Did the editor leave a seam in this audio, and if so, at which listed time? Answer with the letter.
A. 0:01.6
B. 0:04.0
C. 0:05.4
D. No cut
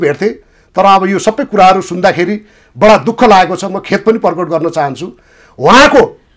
D